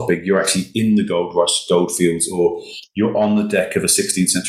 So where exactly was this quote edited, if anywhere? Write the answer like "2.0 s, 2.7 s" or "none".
none